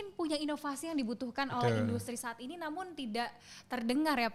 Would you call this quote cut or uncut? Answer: uncut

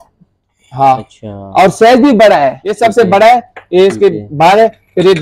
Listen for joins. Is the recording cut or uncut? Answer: cut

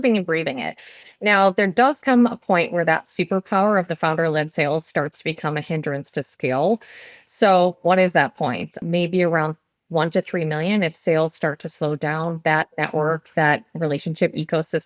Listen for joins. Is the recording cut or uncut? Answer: uncut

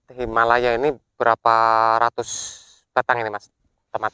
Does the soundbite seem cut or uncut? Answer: uncut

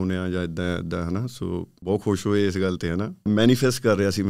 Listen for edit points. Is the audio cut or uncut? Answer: cut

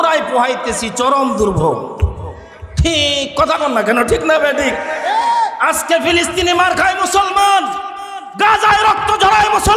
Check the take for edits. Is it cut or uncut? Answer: uncut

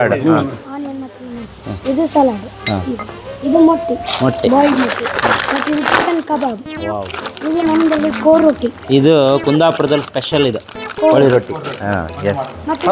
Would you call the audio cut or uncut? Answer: uncut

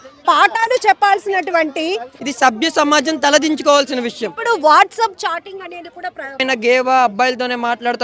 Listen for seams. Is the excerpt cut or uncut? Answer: cut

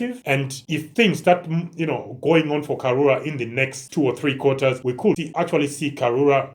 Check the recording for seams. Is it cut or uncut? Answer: uncut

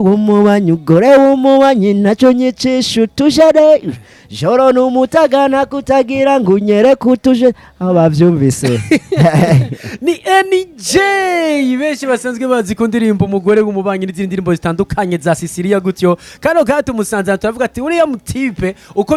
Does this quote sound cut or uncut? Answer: uncut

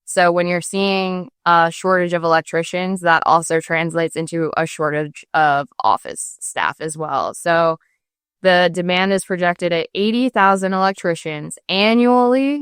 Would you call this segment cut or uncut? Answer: uncut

